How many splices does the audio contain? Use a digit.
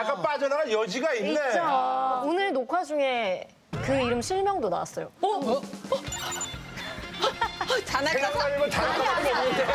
0